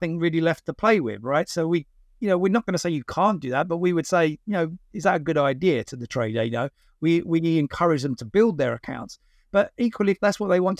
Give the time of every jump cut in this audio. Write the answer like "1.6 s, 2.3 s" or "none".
none